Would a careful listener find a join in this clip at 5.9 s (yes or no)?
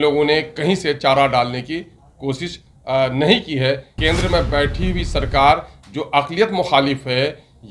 no